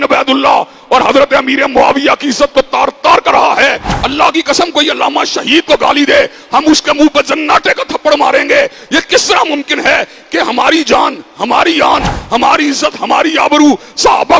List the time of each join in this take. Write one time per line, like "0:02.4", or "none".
0:03.9